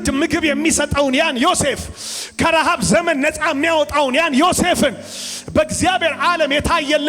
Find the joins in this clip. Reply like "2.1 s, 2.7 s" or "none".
none

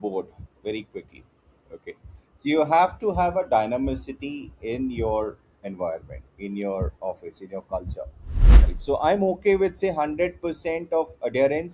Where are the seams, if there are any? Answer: 8.6 s

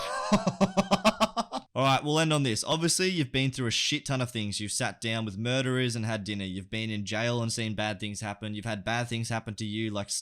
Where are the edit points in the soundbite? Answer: 1.6 s

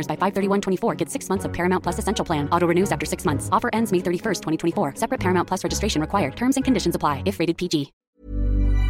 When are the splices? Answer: 7.9 s

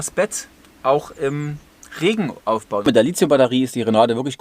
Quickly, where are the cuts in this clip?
2.8 s

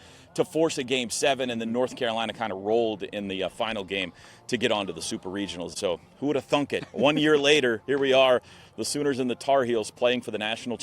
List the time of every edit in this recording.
5.7 s

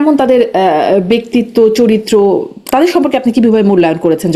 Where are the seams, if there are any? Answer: none

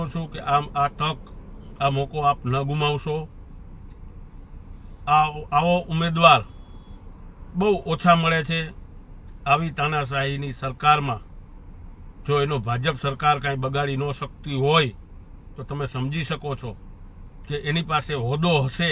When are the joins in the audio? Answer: none

